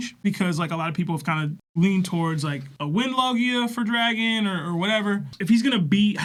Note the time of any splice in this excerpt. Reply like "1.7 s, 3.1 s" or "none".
none

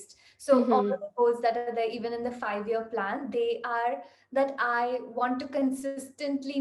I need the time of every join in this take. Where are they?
none

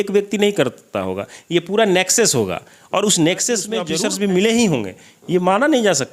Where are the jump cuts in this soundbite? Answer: 3.9 s

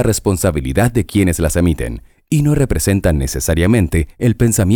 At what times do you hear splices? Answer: none

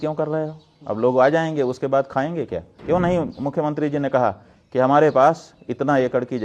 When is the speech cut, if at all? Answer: 2.7 s

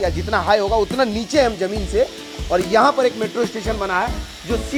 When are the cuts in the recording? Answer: none

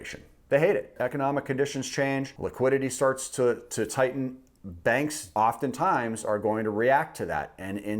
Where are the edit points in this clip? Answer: 0.9 s, 2.4 s, 5.2 s

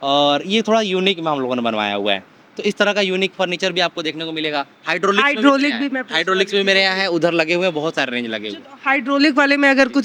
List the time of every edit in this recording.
none

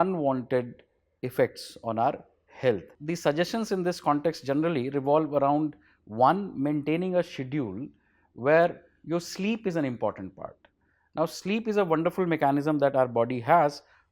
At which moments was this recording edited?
2.9 s

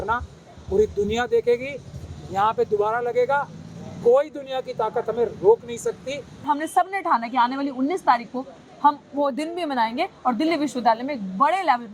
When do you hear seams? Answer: 6.4 s

